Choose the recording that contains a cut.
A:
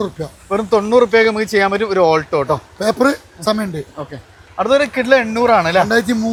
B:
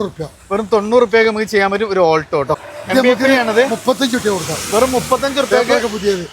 B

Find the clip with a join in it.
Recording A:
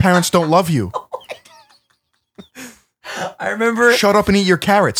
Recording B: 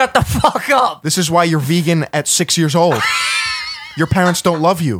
B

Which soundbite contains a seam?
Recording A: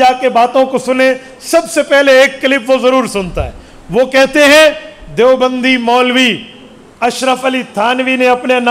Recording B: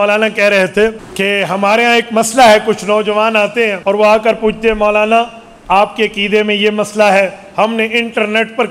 B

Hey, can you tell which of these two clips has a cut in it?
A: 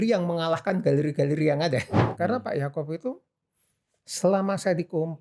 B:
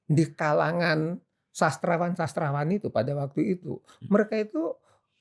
A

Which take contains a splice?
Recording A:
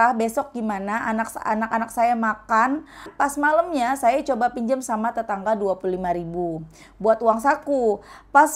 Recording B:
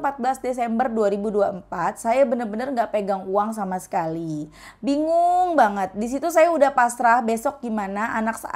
A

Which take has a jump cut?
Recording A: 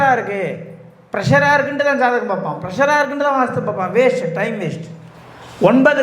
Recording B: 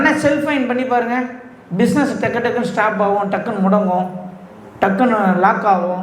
A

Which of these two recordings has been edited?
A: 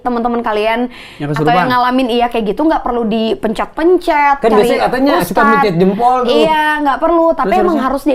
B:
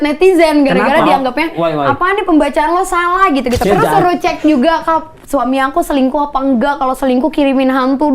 B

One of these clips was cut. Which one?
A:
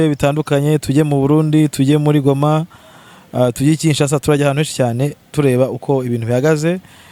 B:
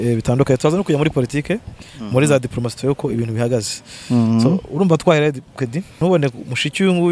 B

